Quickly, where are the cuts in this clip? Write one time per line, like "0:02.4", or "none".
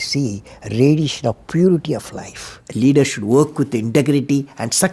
0:02.6